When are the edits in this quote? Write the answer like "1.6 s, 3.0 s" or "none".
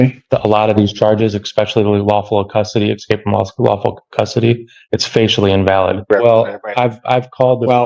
6.1 s